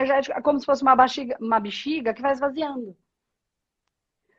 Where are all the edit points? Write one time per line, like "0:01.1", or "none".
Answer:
none